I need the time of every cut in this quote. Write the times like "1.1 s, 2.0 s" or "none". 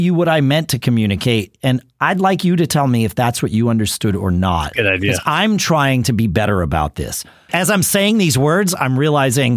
7.4 s